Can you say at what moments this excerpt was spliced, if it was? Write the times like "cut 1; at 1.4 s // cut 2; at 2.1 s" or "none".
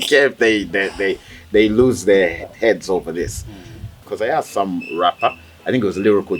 cut 1; at 4.0 s